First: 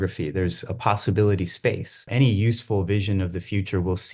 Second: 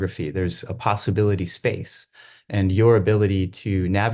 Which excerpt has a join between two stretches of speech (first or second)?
first